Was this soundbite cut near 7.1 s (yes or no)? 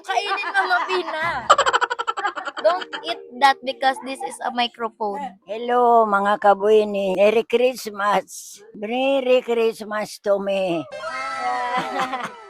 yes